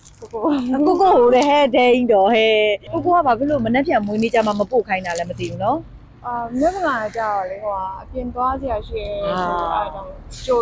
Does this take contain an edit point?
yes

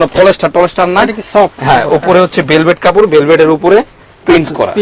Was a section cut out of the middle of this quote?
no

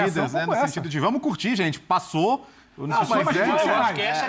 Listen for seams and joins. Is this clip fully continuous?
yes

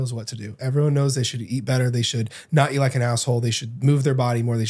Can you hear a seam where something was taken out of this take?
no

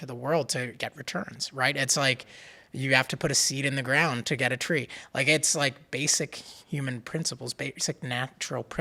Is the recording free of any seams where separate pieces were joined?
yes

